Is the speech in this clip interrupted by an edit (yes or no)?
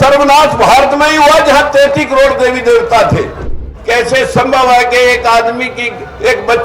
yes